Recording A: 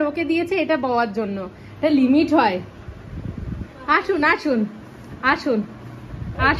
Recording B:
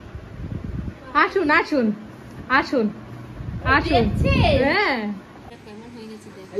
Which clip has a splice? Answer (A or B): B